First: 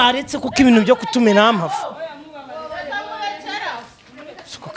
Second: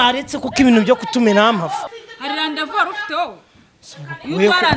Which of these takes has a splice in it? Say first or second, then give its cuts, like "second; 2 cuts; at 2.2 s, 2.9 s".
second; 1 cut; at 1.9 s